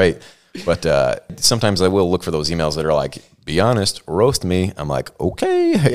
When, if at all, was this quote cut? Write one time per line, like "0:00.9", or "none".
0:01.4